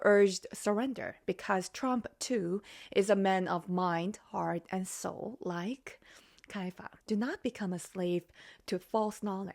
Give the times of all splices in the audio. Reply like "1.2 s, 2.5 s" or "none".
6.9 s